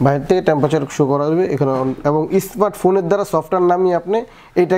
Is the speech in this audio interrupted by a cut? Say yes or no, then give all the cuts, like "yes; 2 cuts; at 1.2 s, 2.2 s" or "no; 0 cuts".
no; 0 cuts